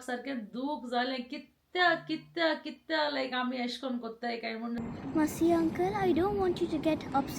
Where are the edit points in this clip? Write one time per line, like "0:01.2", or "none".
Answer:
0:04.8